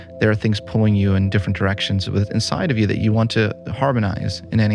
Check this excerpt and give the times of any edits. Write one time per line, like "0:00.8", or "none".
none